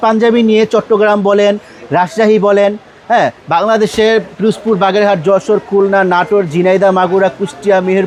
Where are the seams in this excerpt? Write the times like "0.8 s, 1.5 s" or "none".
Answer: none